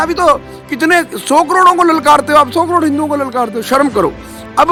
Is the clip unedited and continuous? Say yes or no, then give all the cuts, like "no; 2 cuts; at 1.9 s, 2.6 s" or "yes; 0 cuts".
yes; 0 cuts